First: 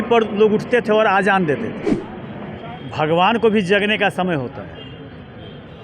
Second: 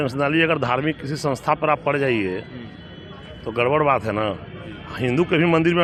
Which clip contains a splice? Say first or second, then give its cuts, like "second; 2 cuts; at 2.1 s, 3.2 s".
first; 1 cut; at 1.9 s